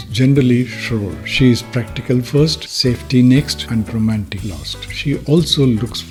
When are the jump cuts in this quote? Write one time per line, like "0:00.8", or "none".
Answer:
none